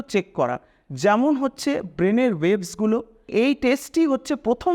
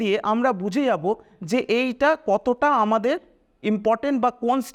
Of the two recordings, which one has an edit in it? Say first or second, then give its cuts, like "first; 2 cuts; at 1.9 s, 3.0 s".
first; 1 cut; at 3.3 s